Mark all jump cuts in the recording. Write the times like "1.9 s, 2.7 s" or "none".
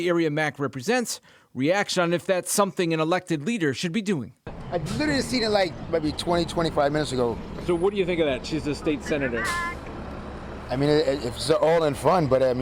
none